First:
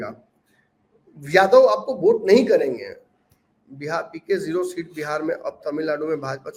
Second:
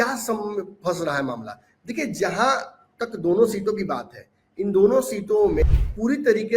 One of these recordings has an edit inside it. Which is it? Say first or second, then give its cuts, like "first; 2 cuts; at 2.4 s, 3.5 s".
second; 1 cut; at 5.6 s